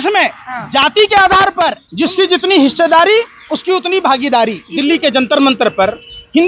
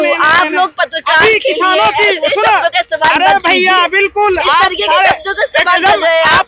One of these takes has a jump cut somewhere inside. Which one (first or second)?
first